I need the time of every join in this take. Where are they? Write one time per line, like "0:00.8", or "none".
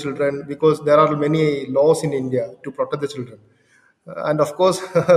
none